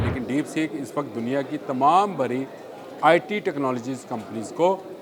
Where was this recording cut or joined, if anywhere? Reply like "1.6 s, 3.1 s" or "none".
none